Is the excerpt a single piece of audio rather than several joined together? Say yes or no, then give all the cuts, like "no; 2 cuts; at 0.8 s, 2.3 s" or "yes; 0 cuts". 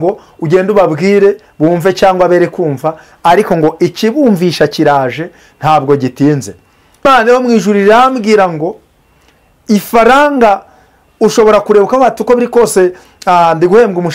no; 1 cut; at 7.0 s